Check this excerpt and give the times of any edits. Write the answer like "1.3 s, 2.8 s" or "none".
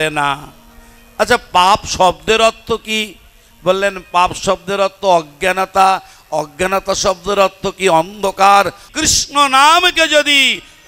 8.9 s